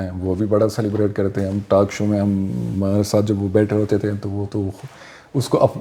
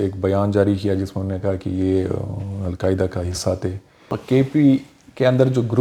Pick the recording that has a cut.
second; 1 cut; at 4.2 s

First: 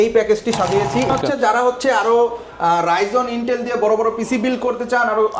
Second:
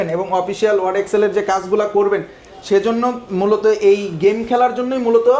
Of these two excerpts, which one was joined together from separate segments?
first; 1 cut; at 1.1 s

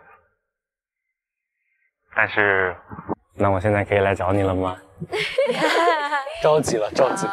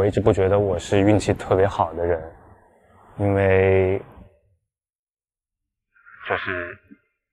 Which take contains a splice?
first; 1 cut; at 3.3 s

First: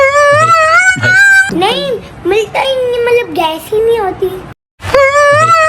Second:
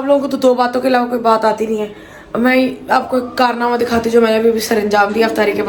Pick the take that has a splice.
first; 1 cut; at 1.4 s

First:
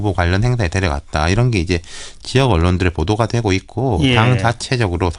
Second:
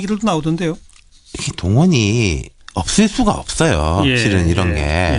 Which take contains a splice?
second; 1 cut; at 3.8 s

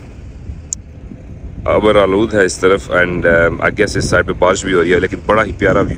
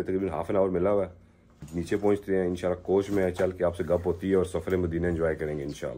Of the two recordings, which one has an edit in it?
second; 1 cut; at 1.6 s

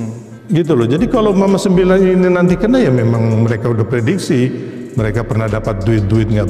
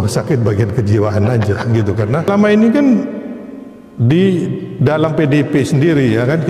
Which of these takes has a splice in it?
second; 1 cut; at 2.3 s

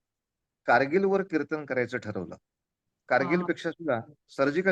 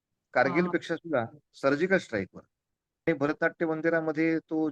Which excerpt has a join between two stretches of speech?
second; 1 cut; at 3.0 s

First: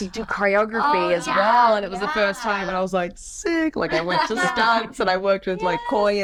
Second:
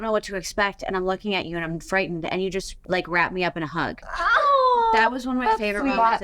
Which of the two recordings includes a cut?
second; 2 cuts; at 2.8 s, 4.0 s

